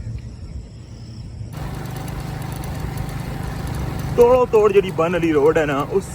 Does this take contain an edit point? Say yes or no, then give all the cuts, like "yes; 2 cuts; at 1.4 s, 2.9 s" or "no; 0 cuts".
yes; 1 cut; at 1.5 s